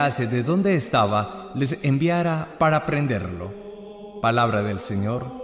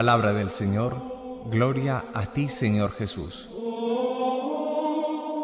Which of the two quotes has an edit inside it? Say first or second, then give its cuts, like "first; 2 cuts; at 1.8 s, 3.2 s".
first; 1 cut; at 1.5 s